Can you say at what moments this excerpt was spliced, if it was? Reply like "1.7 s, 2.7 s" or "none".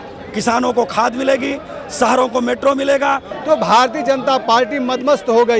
3.3 s